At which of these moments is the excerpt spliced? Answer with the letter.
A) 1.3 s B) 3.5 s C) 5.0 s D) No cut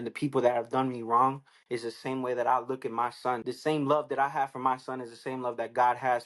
B